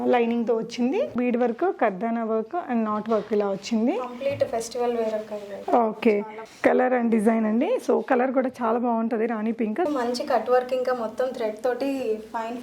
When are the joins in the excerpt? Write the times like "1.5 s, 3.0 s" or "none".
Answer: 1.1 s, 9.9 s

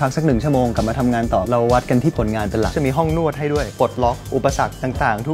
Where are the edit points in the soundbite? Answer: 2.7 s, 3.7 s

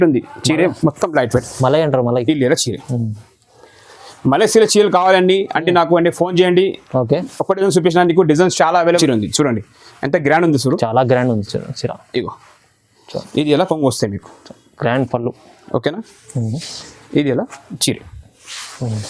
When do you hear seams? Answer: 9.0 s

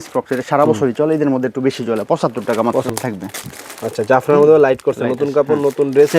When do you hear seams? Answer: 2.9 s

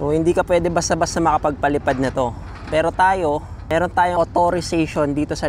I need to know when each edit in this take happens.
4.1 s

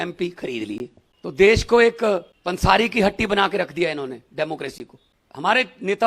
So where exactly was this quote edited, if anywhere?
1.0 s, 2.3 s

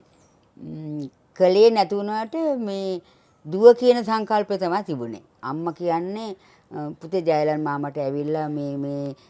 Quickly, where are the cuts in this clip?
5.3 s

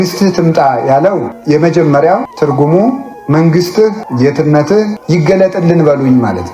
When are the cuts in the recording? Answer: 1.3 s, 2.3 s, 3.1 s, 4.0 s, 5.0 s

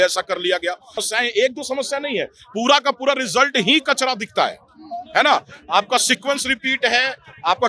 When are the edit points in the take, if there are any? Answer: 1.1 s

